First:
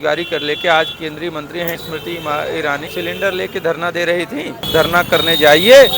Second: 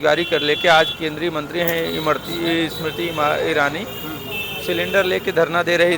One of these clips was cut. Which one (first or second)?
first